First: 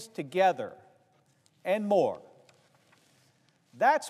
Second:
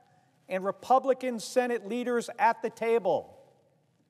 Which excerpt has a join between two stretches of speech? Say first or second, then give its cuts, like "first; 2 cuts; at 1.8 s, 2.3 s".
second; 1 cut; at 2.7 s